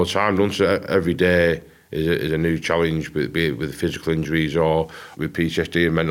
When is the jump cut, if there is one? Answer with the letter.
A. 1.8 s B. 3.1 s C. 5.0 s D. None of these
C